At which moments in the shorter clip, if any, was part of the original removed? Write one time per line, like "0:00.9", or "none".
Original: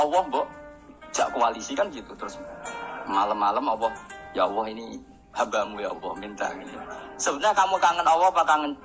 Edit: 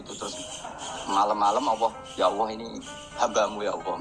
0:02.0